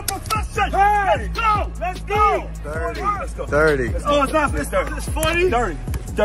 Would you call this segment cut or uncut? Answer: cut